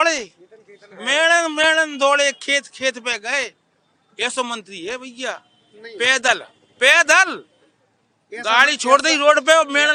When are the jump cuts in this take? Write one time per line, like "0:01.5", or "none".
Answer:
none